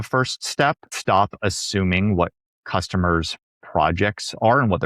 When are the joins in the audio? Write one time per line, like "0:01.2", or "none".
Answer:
0:00.9

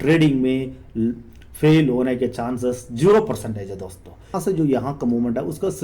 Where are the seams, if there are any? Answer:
0:04.3

